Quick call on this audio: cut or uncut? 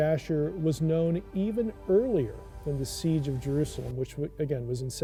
uncut